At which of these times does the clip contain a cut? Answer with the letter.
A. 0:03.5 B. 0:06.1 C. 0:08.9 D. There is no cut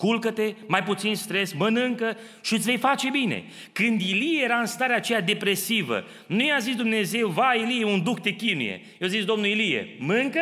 D